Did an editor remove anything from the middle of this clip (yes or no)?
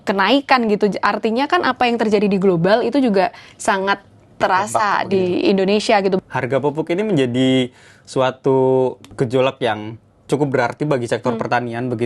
yes